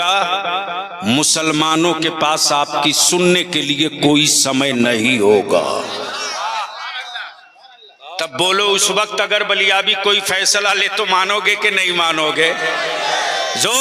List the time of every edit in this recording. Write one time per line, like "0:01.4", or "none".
none